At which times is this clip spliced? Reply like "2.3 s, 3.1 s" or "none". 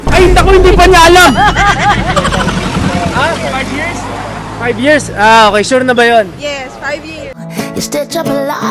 none